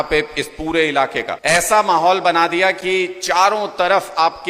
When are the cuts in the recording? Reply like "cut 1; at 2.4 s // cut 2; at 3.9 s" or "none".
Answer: cut 1; at 1.3 s